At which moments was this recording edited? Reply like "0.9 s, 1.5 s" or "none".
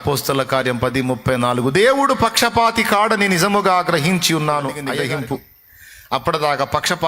4.9 s